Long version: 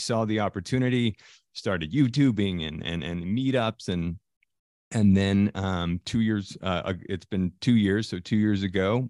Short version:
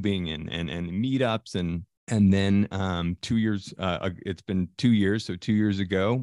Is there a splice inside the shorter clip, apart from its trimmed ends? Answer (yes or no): yes